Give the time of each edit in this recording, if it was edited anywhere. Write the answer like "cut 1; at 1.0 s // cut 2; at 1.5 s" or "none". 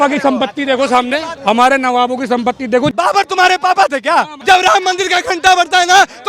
cut 1; at 1.3 s // cut 2; at 2.9 s // cut 3; at 4.3 s